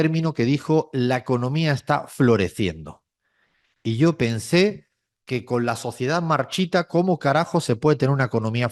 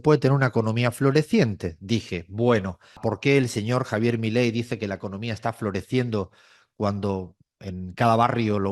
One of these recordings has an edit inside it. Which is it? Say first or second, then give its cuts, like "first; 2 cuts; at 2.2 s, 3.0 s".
second; 1 cut; at 3.0 s